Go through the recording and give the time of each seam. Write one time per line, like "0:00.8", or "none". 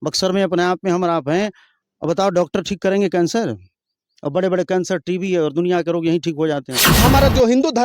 0:06.8